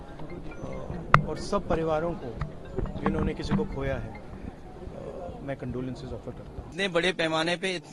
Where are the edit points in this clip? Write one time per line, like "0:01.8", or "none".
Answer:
0:06.7